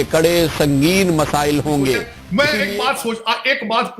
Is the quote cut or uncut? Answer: cut